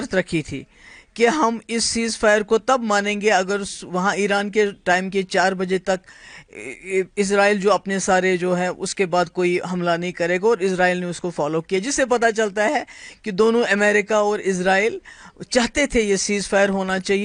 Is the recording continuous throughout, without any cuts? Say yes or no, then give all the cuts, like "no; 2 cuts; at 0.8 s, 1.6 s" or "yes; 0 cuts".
yes; 0 cuts